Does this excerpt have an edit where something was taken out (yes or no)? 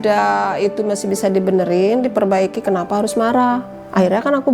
no